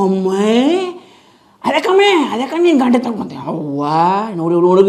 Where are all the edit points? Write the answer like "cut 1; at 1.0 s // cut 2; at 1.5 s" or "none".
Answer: none